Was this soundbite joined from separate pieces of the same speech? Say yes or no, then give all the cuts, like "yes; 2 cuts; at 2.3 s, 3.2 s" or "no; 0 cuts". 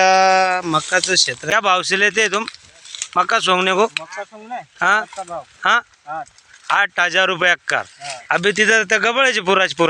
yes; 1 cut; at 1.4 s